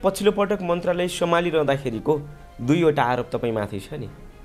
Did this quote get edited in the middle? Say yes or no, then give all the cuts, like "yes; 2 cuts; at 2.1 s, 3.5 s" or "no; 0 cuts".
no; 0 cuts